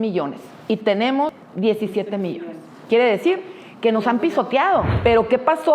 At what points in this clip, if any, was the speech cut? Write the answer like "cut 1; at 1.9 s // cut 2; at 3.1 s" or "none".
cut 1; at 1.4 s // cut 2; at 4.9 s